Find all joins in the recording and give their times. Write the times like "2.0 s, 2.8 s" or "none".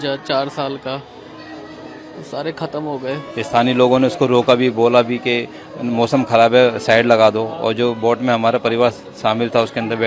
3.3 s